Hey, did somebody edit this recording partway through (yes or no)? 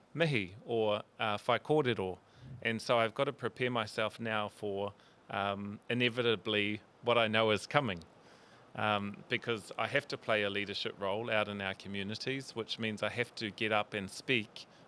no